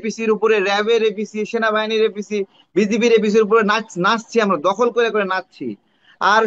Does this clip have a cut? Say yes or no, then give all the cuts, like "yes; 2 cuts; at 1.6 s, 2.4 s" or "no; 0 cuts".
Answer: no; 0 cuts